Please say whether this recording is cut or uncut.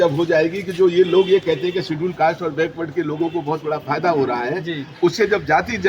uncut